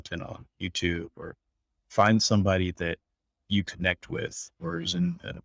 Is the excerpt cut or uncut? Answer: uncut